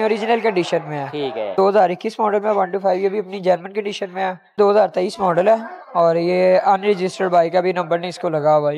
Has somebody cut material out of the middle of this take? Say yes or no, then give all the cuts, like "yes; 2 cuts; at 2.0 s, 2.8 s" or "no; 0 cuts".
yes; 2 cuts; at 1.5 s, 4.6 s